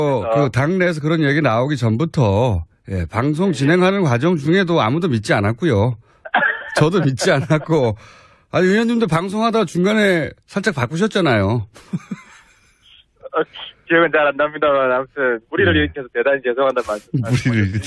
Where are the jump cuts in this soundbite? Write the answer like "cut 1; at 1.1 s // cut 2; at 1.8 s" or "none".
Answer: none